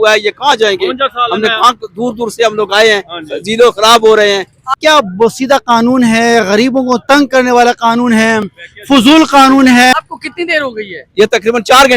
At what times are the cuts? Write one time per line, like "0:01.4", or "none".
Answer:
0:04.6
0:10.0